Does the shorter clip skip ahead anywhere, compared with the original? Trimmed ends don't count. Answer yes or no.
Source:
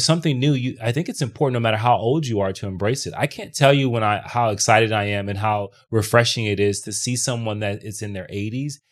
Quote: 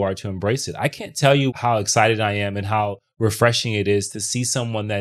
yes